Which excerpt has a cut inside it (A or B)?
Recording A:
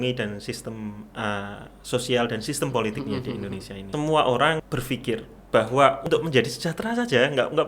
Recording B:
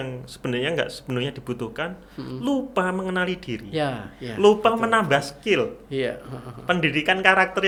A